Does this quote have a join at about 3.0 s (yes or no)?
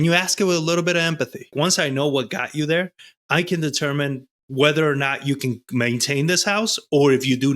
no